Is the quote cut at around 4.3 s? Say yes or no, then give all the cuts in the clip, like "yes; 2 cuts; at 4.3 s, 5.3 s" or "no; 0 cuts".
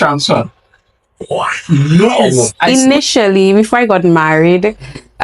no; 1 cut; at 2.7 s